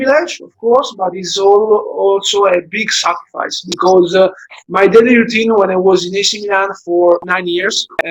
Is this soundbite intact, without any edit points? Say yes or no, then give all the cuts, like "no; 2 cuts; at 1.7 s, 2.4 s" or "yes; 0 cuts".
yes; 0 cuts